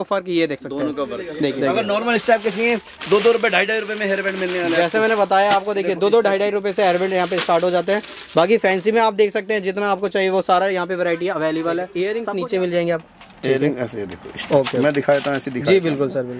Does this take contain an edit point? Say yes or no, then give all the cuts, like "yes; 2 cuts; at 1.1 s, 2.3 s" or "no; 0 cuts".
yes; 2 cuts; at 1.6 s, 12.0 s